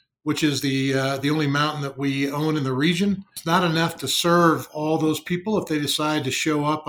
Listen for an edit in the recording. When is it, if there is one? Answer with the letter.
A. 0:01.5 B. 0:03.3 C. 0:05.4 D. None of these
B